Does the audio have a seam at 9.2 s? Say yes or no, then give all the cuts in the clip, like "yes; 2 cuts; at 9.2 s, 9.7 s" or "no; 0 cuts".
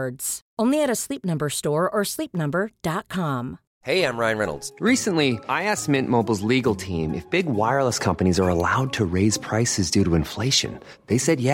no; 1 cut; at 3.7 s